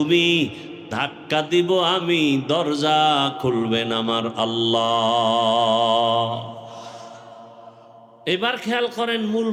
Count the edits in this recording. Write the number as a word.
zero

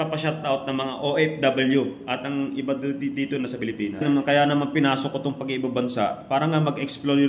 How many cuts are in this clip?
one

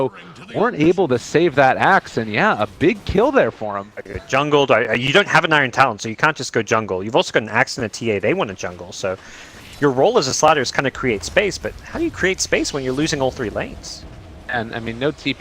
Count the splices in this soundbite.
one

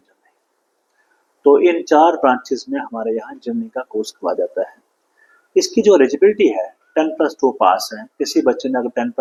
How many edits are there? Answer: zero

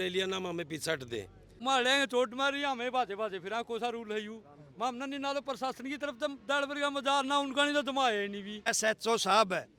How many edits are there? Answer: two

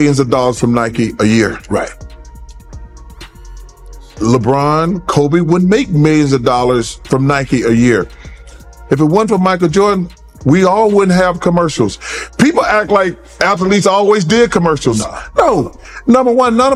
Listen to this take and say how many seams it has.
zero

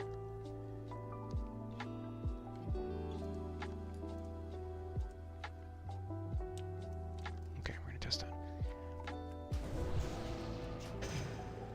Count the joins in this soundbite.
one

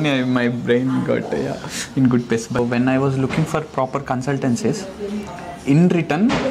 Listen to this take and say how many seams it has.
one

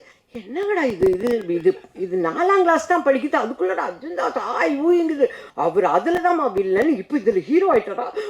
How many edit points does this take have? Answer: one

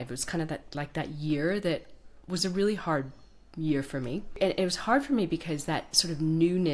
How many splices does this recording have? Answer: one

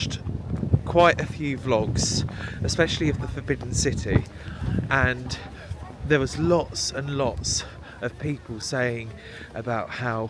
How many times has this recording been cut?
zero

